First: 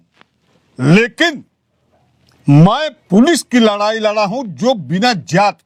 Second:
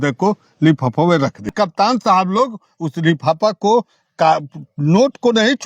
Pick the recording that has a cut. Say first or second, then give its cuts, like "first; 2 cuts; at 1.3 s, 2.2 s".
second; 1 cut; at 1.5 s